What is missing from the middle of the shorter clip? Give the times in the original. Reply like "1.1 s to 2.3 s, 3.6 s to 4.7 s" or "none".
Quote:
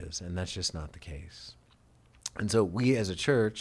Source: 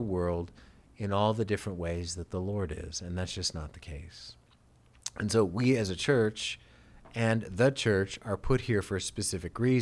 none